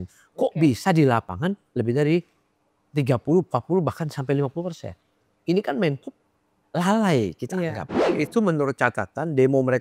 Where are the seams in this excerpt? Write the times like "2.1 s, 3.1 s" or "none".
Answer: 8.0 s